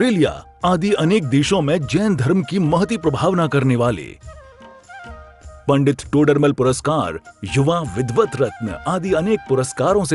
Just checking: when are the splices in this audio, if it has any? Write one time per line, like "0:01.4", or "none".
none